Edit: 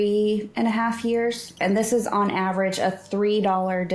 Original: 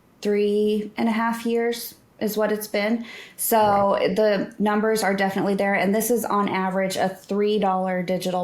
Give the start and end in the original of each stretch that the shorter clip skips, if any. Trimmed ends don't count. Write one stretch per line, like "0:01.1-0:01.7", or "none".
0:02.0-0:05.8